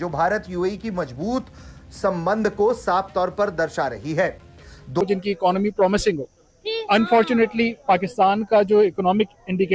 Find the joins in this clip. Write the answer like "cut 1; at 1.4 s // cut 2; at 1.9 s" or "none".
cut 1; at 5.0 s